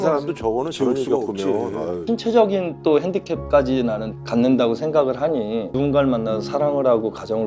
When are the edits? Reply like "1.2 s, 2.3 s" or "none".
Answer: 2.0 s, 5.7 s